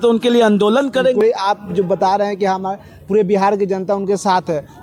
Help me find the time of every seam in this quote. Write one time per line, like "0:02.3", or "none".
none